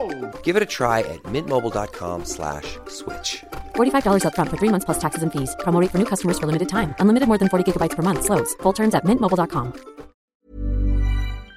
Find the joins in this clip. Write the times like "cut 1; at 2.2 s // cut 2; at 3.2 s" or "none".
cut 1; at 10.2 s